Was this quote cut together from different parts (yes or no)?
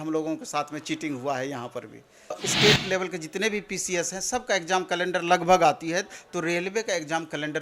yes